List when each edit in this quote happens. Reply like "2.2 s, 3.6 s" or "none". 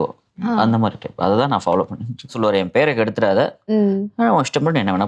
2.3 s